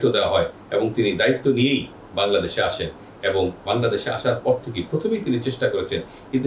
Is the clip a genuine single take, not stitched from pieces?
yes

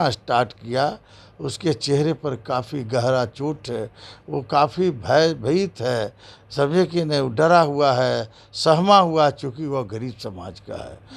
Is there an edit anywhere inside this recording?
no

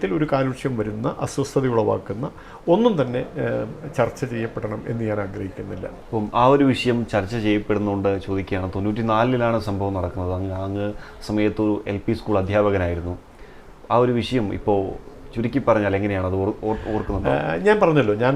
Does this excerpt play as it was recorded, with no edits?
yes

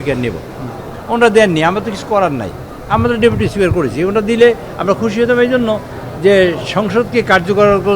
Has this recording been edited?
no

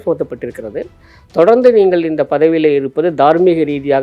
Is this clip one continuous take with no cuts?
yes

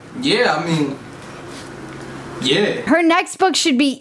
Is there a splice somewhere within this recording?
yes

